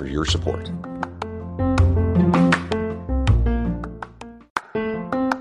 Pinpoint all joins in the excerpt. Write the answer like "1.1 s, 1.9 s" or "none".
4.4 s